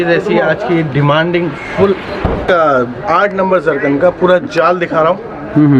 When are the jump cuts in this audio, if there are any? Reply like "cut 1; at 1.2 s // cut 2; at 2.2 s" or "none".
cut 1; at 2.5 s